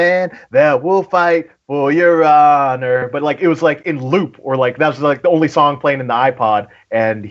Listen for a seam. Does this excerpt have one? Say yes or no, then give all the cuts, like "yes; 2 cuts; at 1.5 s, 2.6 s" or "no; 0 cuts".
no; 0 cuts